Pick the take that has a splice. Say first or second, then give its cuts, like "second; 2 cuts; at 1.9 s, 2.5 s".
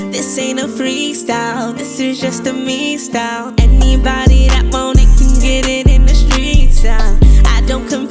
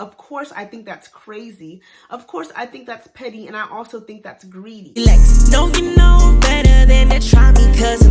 second; 1 cut; at 4.9 s